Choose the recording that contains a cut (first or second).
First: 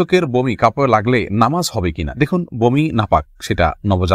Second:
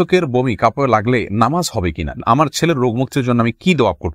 second